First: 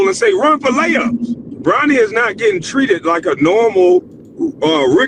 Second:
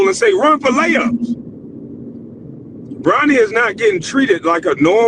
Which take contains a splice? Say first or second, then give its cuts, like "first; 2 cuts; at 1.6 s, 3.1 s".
first; 1 cut; at 1.5 s